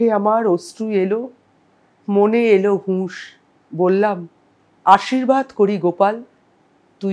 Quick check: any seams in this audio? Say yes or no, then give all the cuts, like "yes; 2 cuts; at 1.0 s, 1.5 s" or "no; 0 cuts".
no; 0 cuts